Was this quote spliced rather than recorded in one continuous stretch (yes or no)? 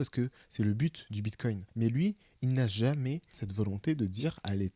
no